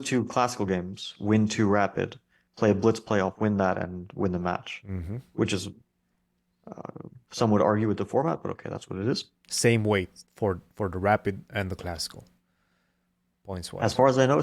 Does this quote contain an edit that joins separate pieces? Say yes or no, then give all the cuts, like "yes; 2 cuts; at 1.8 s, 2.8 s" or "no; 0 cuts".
no; 0 cuts